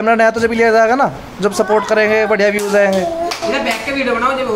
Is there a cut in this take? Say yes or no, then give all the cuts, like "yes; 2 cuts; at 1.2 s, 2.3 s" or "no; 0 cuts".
no; 0 cuts